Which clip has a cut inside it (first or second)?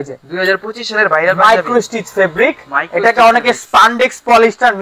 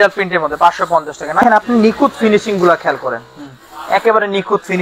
second